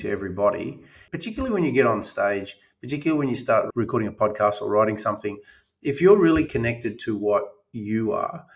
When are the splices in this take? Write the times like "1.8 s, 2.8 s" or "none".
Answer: 1.0 s